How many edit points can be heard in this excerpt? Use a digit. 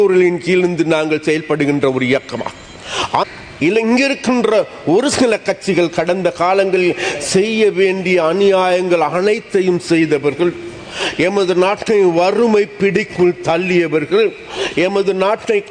1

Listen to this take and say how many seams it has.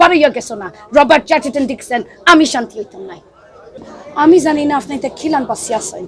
1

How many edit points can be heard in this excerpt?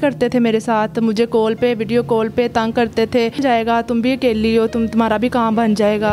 1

